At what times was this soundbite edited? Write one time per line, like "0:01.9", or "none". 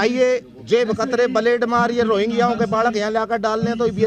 none

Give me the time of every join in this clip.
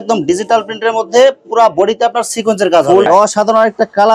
0:03.1

